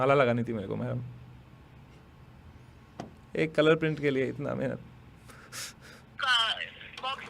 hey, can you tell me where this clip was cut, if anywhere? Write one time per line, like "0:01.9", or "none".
0:06.1

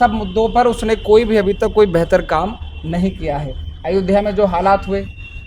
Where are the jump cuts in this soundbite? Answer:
none

